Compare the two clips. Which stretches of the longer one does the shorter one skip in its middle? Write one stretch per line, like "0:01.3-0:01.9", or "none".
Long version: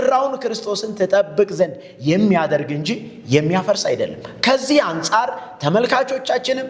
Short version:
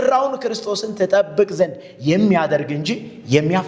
none